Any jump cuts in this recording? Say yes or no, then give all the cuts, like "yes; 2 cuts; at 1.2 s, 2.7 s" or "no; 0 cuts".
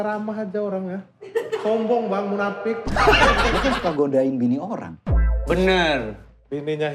yes; 1 cut; at 3.6 s